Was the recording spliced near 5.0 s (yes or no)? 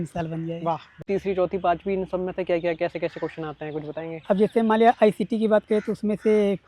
no